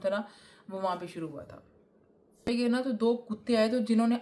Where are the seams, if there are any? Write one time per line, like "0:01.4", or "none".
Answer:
0:02.5